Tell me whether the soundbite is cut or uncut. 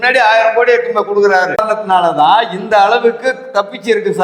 cut